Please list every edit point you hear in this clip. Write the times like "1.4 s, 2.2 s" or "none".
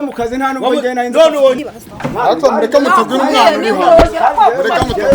1.6 s

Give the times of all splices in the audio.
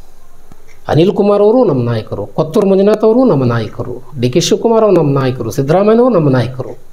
none

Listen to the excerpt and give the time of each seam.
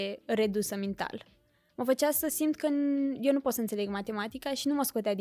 none

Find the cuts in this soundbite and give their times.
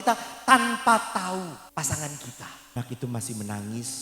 1.6 s, 2.8 s

